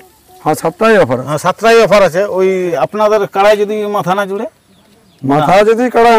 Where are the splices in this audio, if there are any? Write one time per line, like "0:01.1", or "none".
0:02.7